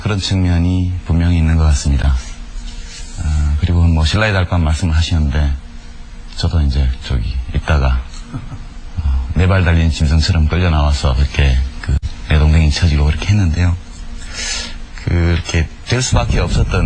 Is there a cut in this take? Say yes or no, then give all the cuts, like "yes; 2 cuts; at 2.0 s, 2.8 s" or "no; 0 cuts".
no; 0 cuts